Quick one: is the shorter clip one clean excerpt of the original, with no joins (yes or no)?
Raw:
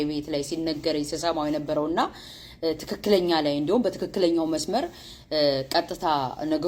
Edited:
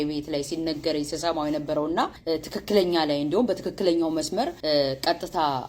no